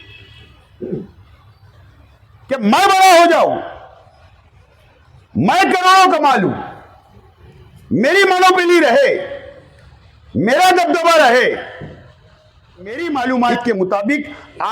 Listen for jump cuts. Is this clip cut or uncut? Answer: cut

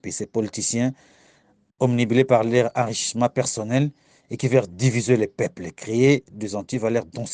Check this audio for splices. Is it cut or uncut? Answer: uncut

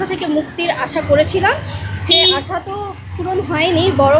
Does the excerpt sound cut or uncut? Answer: uncut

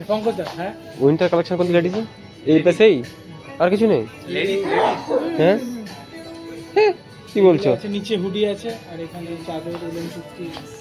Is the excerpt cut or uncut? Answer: uncut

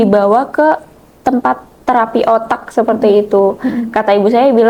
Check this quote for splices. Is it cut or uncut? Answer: uncut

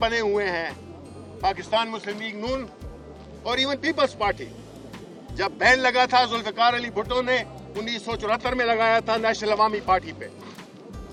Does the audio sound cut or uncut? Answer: uncut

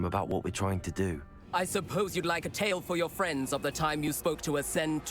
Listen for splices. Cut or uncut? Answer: cut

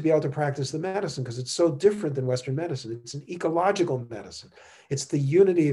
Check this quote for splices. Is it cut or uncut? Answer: uncut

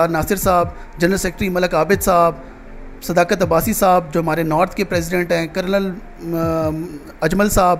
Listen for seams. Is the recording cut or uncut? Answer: uncut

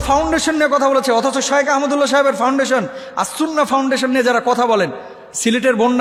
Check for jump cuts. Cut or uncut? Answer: uncut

